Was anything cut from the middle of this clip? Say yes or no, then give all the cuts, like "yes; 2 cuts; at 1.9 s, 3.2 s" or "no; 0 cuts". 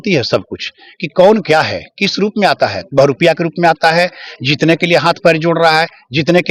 no; 0 cuts